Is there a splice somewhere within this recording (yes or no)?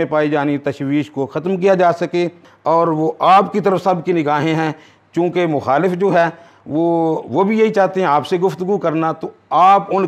no